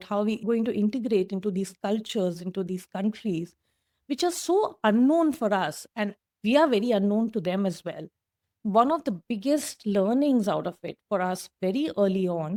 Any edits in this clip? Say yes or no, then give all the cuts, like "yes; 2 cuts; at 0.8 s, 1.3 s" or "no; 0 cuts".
no; 0 cuts